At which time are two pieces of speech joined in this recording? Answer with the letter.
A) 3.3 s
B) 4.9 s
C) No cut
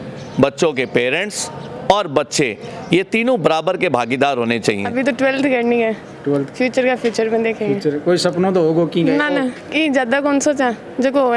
B